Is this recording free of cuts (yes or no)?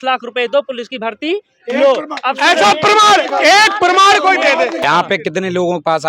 no